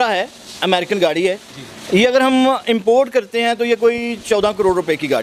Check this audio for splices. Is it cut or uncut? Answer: uncut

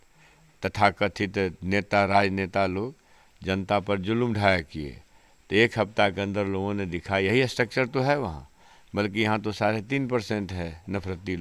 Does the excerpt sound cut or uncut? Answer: uncut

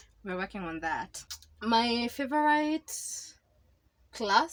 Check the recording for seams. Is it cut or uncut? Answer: uncut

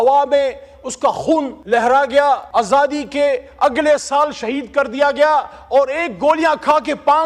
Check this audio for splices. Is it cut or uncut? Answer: cut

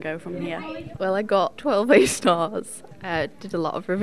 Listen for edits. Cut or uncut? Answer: cut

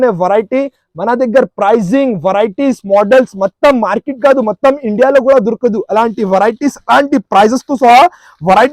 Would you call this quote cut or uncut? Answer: uncut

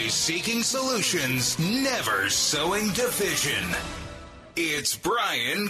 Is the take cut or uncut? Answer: uncut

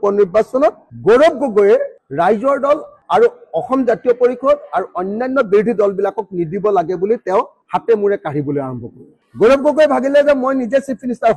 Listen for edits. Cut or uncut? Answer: uncut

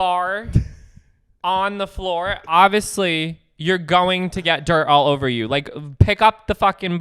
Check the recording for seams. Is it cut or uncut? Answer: uncut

